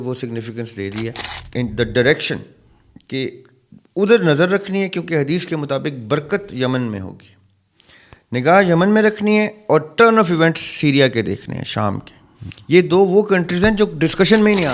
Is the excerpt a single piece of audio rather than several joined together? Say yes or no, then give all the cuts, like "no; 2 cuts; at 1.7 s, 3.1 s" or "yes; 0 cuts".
no; 1 cut; at 1.3 s